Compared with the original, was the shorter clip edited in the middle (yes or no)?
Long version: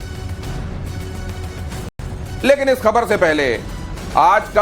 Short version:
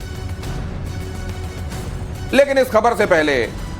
yes